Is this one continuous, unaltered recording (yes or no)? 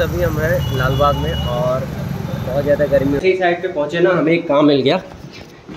no